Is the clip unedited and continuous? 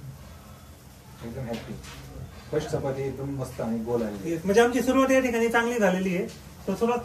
yes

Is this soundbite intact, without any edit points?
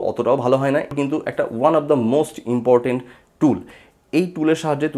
no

